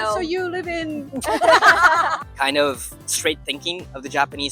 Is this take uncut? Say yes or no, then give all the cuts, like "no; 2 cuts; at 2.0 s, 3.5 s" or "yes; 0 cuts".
no; 1 cut; at 2.2 s